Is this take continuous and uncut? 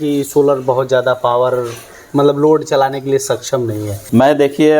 yes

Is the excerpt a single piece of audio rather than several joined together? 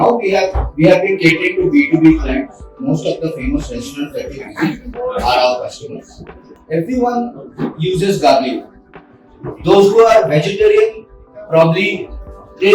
no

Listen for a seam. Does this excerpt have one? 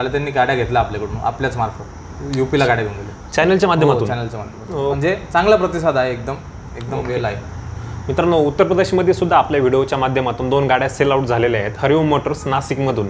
no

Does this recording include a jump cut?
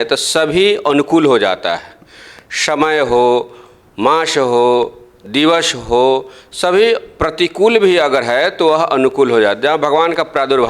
no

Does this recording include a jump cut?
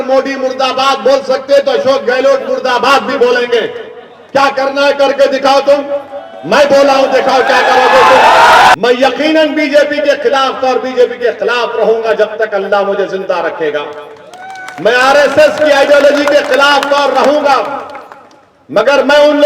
yes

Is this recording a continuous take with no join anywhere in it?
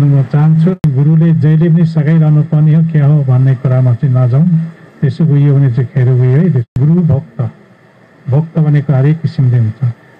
no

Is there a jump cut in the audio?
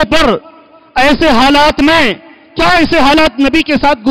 no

